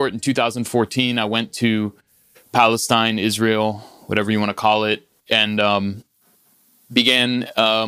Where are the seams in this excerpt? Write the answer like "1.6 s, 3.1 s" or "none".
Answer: none